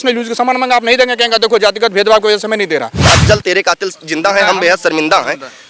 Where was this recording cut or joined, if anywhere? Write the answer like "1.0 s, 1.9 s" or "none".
2.9 s

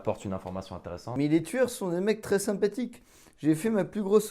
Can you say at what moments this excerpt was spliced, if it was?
1.0 s

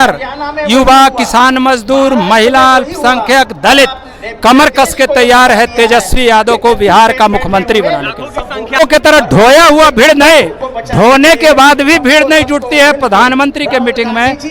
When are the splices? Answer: 8.8 s

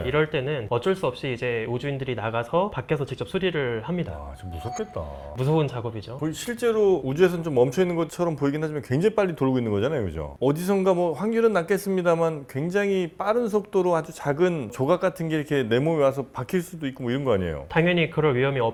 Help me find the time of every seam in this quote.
none

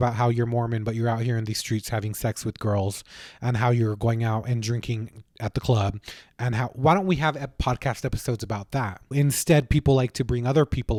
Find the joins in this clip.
none

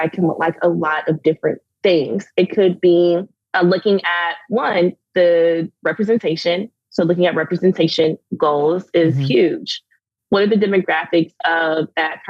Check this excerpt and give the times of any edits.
1.7 s, 3.4 s

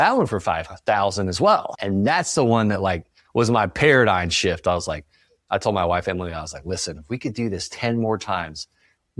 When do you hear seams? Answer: 1.7 s

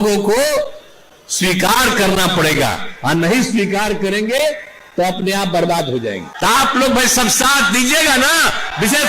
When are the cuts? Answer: 6.3 s

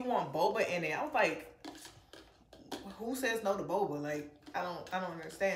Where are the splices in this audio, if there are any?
none

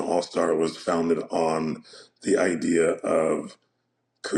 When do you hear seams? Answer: none

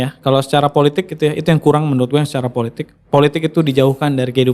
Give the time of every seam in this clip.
2.8 s

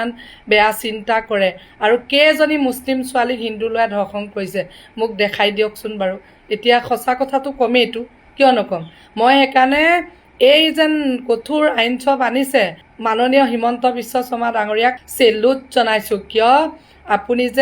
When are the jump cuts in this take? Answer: 15.0 s

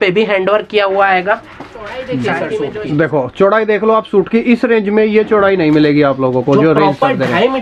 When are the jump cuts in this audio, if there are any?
2.5 s

